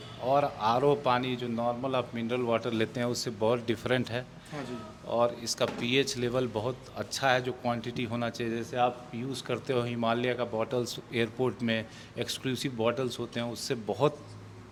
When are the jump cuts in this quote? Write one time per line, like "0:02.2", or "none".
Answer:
none